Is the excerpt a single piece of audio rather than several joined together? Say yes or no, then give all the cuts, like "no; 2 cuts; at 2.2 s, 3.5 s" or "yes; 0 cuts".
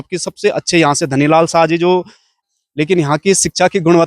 no; 1 cut; at 2.3 s